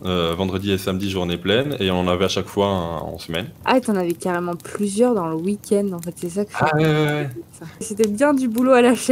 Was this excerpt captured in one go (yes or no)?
no